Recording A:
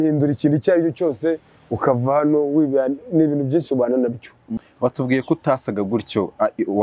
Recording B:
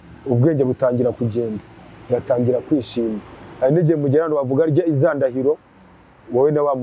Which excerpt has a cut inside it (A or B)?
A